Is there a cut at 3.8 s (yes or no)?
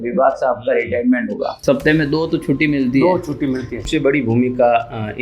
yes